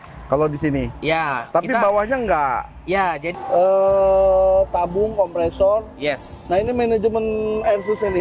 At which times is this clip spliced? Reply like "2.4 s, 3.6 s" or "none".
3.3 s

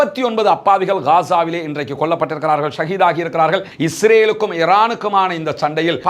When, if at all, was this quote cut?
3.7 s

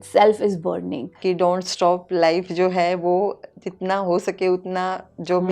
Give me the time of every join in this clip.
1.2 s

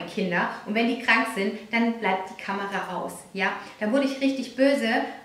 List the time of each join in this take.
none

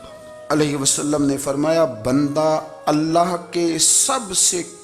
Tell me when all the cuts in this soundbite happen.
none

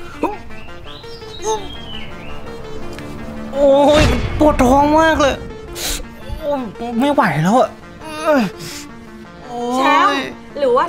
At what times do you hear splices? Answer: 3.3 s

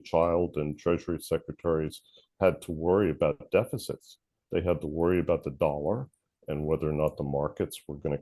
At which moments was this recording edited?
none

